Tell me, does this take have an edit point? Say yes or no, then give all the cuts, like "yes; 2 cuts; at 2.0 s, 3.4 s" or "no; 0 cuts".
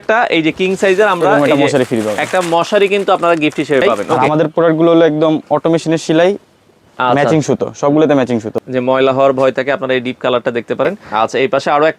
yes; 3 cuts; at 4.1 s, 8.5 s, 11.0 s